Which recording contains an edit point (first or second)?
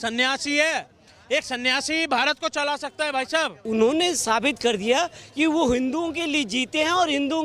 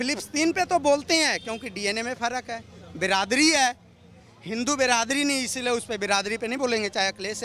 first